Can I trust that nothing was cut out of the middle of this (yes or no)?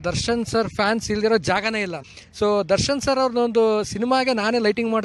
no